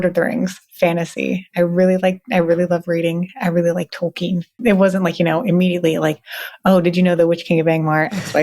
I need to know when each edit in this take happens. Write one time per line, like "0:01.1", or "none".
0:04.6

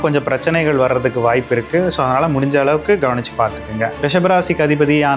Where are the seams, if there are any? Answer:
0:03.9

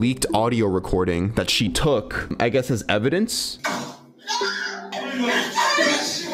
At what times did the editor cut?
0:02.3
0:04.9

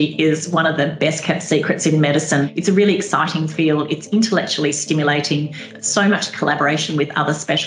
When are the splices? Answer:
0:02.5
0:05.7

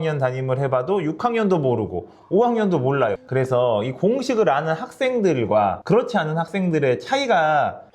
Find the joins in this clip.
0:03.2

